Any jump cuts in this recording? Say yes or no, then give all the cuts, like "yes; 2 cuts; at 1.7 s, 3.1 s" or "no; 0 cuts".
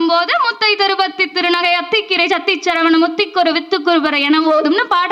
no; 0 cuts